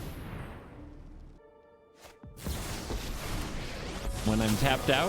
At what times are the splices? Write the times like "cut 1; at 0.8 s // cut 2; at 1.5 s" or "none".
cut 1; at 1.4 s